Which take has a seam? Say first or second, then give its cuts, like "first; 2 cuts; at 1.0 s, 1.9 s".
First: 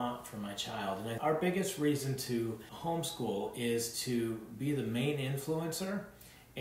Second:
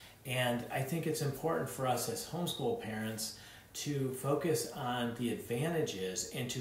first; 2 cuts; at 1.2 s, 2.7 s